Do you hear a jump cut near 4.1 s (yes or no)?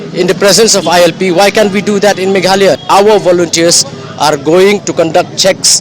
no